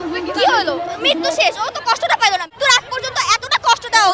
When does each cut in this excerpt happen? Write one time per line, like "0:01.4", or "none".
0:02.6